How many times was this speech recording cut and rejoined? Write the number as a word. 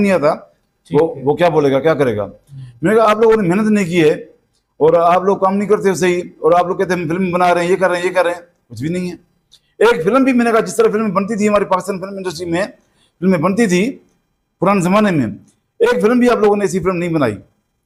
zero